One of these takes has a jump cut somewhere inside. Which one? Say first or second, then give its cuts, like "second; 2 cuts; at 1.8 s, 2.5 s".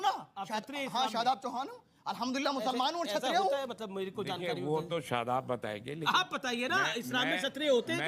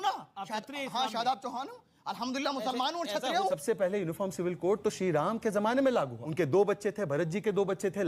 second; 2 cuts; at 3.6 s, 6.2 s